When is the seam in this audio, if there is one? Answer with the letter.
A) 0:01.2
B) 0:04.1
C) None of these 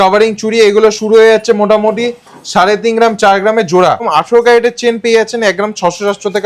B